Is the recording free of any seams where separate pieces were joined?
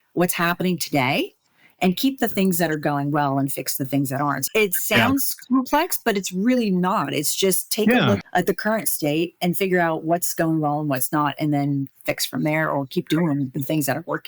no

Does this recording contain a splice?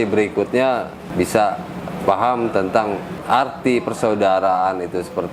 yes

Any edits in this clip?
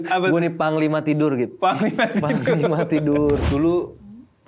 yes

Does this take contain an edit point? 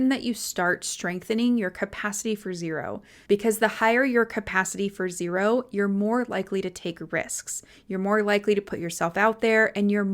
yes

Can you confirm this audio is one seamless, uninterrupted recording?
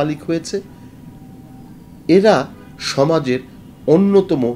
yes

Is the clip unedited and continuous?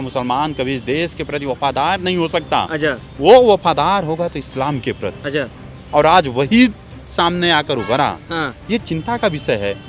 yes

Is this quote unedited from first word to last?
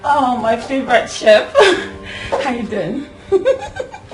yes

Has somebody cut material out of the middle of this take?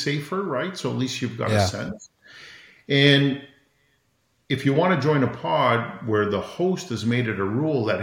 no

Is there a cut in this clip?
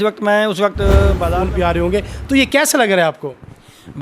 yes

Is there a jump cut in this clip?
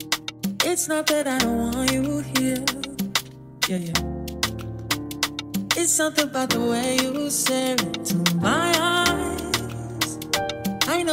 no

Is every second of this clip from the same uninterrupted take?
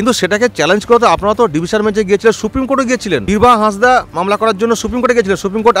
no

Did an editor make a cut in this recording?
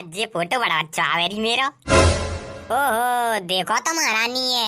yes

